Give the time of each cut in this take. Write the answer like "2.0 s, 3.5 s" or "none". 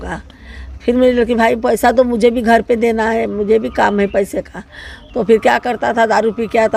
none